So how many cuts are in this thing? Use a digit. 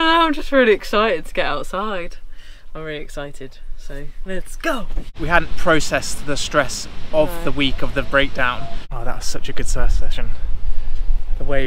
2